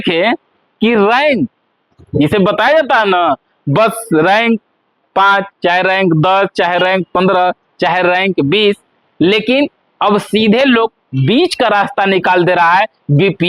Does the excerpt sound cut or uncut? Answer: uncut